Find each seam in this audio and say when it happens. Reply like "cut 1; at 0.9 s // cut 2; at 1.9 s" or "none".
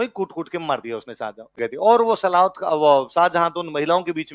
cut 1; at 1.5 s